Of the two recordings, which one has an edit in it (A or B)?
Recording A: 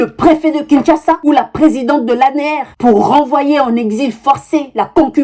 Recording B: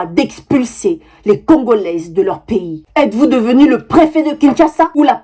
B